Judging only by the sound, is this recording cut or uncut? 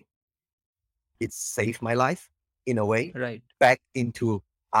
cut